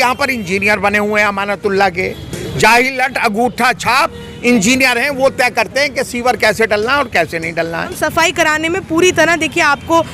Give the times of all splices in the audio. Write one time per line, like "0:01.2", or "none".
0:08.0